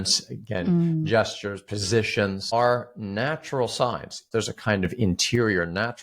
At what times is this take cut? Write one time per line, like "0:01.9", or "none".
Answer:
0:02.5
0:04.3